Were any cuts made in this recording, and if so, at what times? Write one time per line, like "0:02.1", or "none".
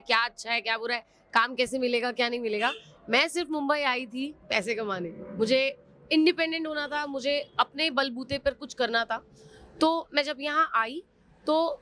none